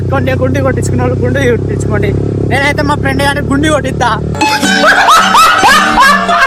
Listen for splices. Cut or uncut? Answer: uncut